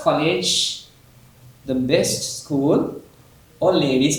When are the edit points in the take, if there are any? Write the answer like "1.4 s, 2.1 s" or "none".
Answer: none